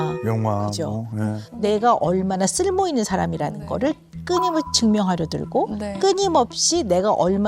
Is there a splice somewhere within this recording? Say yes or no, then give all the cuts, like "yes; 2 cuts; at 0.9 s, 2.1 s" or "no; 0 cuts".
yes; 1 cut; at 1.5 s